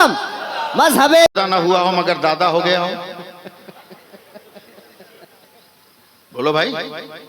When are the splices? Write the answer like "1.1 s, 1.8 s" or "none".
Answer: 1.4 s